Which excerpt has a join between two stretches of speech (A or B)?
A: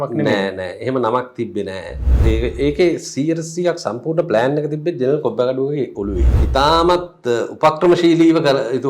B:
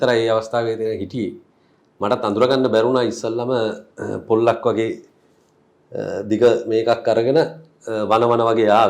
A